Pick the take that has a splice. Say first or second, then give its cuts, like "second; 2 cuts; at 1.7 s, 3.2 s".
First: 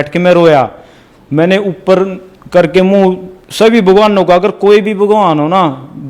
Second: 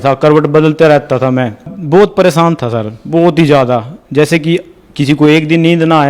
second; 1 cut; at 1.7 s